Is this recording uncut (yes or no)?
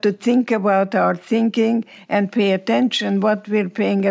yes